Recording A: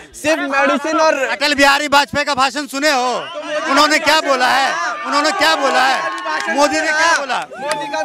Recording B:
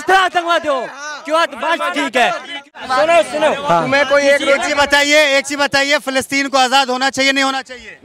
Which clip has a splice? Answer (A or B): B